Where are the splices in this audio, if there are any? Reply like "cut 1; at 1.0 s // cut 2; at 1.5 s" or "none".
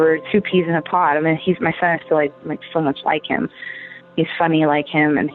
none